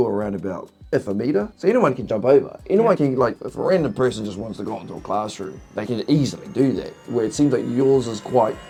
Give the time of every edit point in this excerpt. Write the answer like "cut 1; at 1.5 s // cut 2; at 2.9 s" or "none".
none